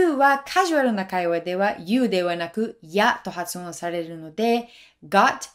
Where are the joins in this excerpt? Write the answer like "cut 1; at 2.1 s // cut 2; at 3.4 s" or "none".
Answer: none